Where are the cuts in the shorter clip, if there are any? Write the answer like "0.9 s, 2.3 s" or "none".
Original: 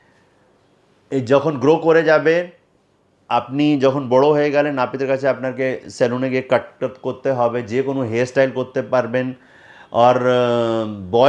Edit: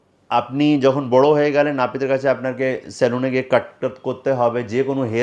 none